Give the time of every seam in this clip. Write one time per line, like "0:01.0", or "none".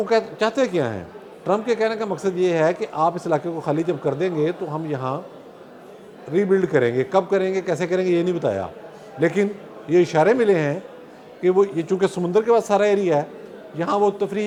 none